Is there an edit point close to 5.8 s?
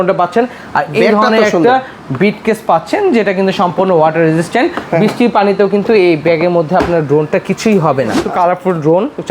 no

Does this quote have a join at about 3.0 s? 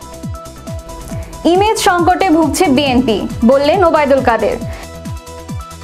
no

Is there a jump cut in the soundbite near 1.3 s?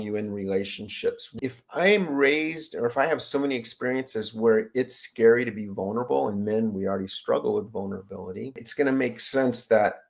yes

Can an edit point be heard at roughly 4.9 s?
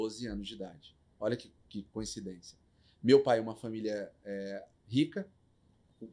no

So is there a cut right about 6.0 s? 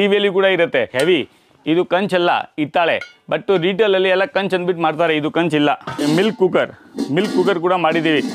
yes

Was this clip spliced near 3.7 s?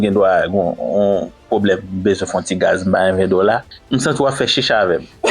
yes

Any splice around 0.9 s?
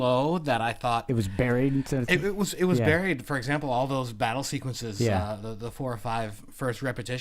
yes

